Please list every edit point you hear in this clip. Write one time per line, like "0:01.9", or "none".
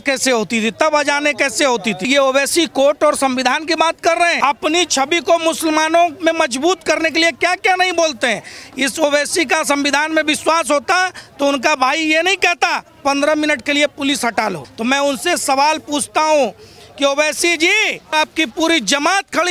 0:02.1
0:04.4
0:14.7
0:18.1